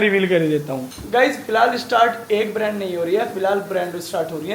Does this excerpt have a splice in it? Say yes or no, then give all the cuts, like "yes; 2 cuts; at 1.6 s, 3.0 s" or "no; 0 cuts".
no; 0 cuts